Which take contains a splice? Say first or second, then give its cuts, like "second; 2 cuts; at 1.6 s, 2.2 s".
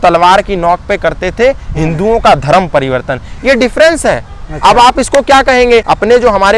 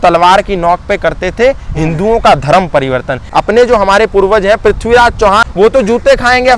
second; 2 cuts; at 3.3 s, 5.5 s